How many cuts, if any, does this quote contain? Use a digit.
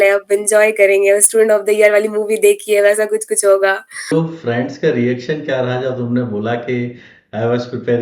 1